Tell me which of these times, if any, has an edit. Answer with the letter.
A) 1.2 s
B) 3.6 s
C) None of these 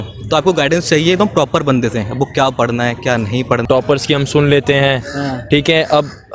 B